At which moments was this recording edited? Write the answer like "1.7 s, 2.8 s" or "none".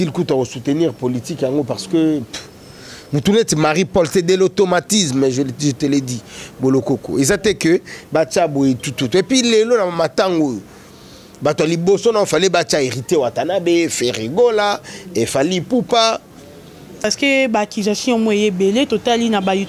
17.0 s